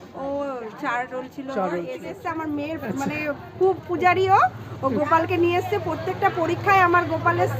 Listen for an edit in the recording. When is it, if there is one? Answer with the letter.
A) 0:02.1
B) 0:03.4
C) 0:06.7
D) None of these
A